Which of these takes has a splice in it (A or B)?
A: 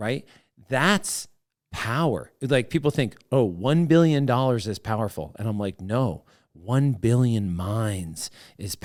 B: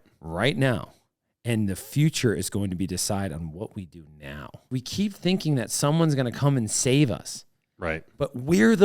B